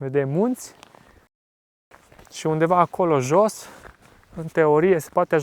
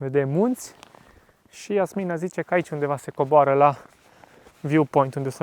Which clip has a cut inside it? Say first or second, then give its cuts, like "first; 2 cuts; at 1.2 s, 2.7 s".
first; 1 cut; at 1.6 s